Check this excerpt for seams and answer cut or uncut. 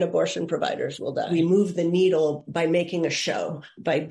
cut